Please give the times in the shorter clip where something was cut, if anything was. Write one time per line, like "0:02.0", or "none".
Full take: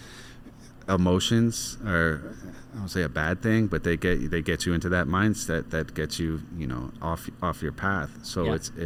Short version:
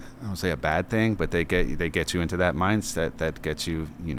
none

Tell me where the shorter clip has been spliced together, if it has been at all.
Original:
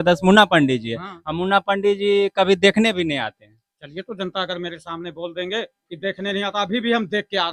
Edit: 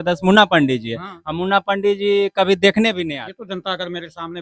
0:03.3

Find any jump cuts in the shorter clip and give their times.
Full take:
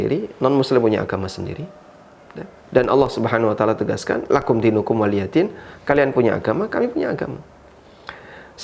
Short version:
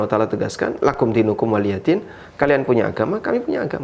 none

